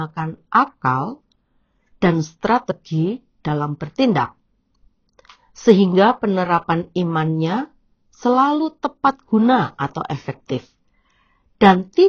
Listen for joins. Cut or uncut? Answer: uncut